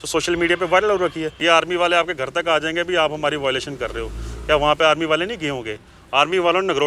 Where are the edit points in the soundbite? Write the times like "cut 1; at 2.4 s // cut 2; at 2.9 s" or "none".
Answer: cut 1; at 1.4 s